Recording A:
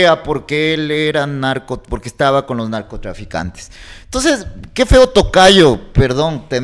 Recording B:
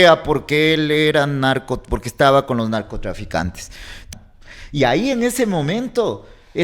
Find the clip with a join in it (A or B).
B